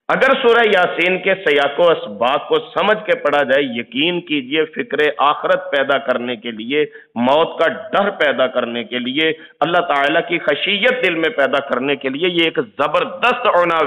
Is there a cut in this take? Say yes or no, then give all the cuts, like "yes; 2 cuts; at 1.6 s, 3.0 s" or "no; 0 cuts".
no; 0 cuts